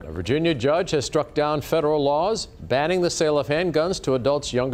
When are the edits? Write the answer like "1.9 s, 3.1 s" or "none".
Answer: none